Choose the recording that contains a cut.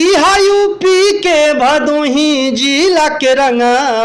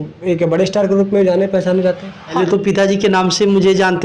second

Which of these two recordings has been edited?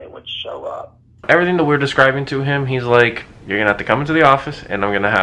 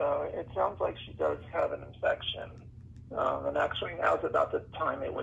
first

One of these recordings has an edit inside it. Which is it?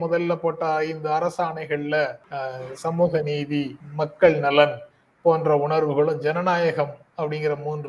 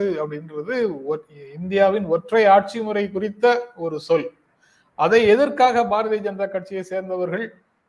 first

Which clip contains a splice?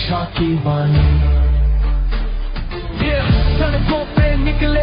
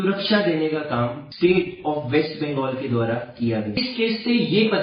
second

